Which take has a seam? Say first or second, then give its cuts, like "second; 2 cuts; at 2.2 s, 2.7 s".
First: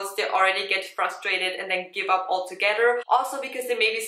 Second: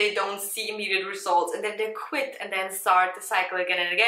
first; 1 cut; at 3.0 s